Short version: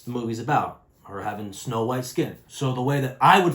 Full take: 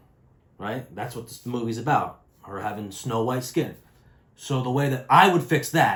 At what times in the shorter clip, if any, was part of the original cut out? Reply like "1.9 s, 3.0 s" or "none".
2.4 s